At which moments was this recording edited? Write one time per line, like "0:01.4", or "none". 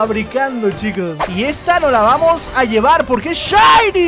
0:01.2